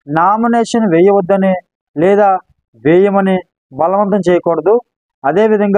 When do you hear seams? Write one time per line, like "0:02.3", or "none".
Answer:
none